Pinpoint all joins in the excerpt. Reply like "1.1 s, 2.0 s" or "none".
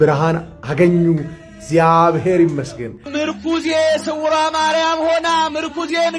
3.1 s